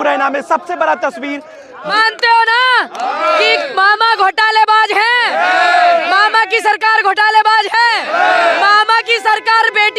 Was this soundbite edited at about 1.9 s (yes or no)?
yes